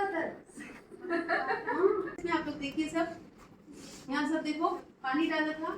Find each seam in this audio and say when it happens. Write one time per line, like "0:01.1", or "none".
0:02.2

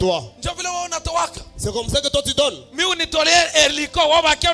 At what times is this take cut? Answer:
none

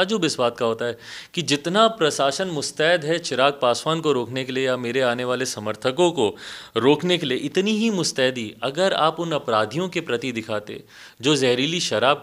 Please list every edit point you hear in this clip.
none

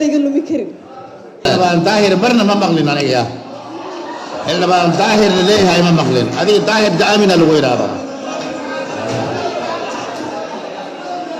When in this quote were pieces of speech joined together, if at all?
0:01.5

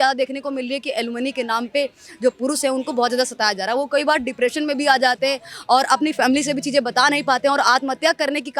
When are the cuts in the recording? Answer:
none

